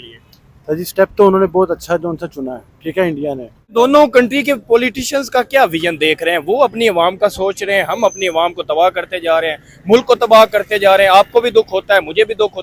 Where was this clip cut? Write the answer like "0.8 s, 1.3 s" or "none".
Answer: 3.7 s